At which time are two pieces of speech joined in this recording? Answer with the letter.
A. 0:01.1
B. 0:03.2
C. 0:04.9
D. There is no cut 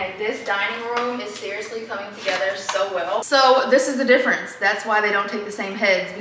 B